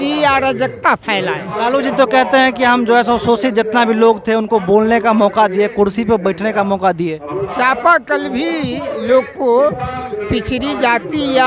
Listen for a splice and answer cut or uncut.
cut